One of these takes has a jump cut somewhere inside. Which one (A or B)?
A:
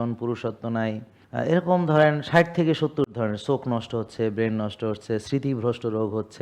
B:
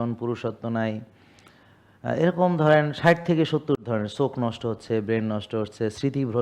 A